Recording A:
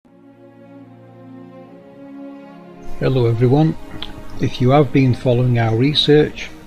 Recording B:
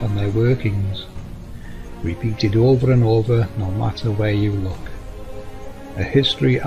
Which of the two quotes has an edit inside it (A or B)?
A